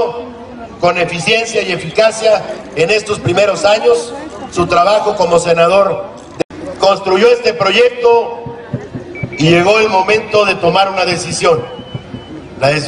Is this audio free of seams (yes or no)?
yes